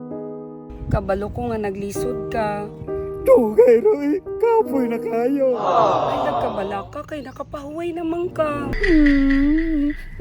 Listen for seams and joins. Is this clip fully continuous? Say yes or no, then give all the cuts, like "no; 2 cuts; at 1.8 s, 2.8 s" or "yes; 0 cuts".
no; 1 cut; at 8.7 s